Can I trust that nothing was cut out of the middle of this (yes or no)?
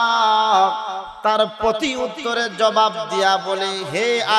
no